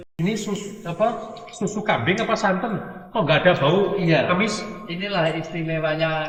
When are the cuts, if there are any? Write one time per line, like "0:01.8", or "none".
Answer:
none